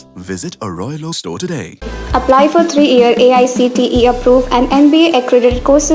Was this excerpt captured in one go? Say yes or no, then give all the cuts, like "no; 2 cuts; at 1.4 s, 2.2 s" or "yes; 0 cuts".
yes; 0 cuts